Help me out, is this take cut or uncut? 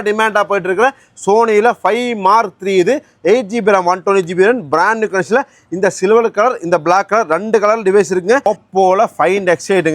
cut